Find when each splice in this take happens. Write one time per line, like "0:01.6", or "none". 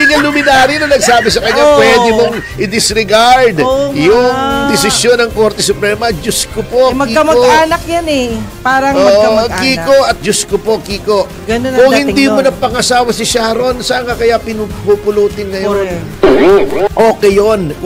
0:10.1
0:16.9